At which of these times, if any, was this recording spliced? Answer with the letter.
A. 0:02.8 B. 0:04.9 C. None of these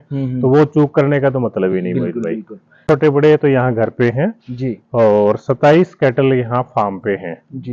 A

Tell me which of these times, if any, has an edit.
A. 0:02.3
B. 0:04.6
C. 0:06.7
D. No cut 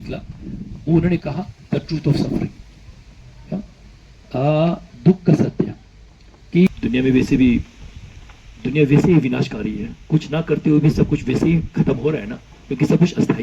C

